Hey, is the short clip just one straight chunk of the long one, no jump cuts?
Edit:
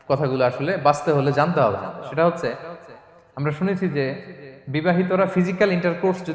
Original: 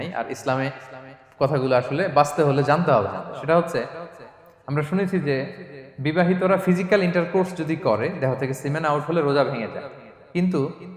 yes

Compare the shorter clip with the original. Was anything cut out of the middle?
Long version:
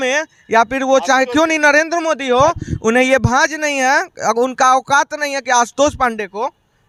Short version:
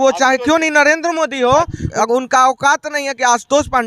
yes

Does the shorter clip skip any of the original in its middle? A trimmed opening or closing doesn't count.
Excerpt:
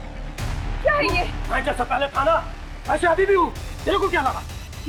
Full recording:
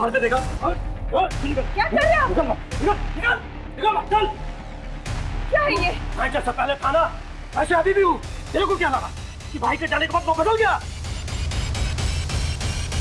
no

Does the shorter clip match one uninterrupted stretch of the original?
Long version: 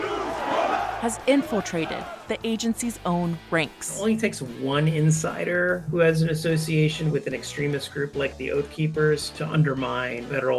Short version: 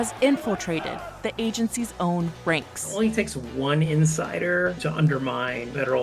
no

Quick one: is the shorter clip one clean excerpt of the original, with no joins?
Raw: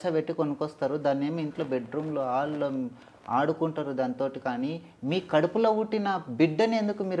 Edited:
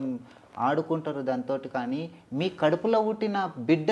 yes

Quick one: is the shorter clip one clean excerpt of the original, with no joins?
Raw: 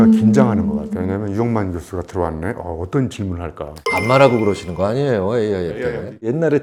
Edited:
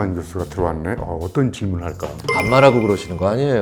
yes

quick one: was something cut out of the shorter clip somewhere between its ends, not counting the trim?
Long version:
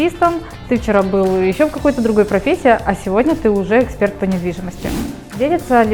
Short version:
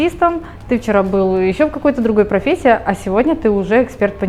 no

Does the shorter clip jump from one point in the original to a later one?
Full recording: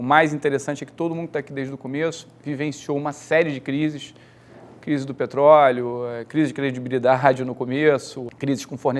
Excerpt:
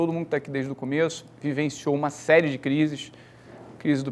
no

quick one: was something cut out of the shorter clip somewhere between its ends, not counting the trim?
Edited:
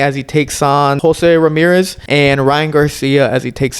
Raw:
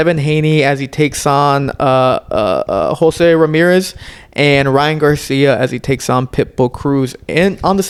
yes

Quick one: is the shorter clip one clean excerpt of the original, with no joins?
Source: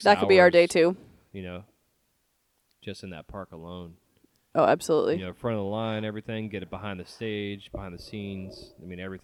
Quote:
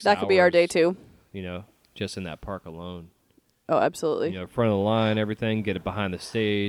no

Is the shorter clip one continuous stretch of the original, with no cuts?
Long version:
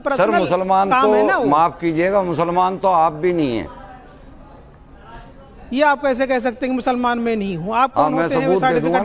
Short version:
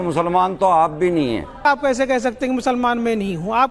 no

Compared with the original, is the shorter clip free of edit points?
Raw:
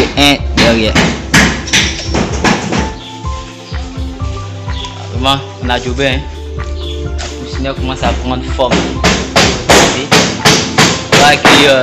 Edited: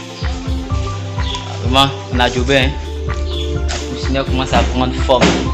yes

